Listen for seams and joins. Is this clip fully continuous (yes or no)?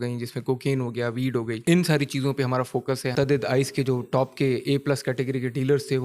no